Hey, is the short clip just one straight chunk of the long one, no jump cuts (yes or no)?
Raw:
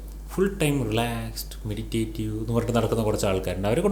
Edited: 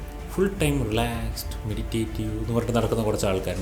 yes